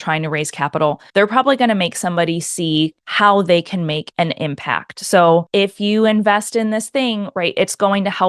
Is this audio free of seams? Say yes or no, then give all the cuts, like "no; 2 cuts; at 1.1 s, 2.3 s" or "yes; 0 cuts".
no; 4 cuts; at 1.0 s, 3.0 s, 4.1 s, 5.5 s